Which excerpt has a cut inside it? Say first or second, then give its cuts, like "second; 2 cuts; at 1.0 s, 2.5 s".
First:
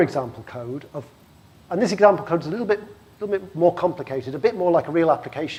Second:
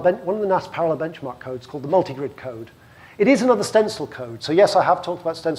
second; 1 cut; at 3.5 s